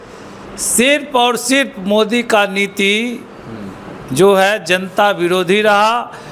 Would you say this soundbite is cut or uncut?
uncut